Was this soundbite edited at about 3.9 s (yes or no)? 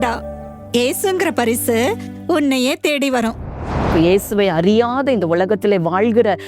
yes